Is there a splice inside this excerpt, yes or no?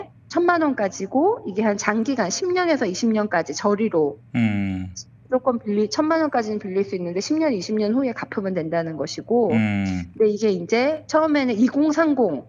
no